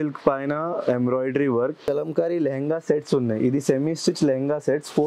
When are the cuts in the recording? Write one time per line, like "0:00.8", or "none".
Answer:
0:01.8